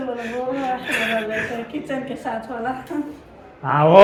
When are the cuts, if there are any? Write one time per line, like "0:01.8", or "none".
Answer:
none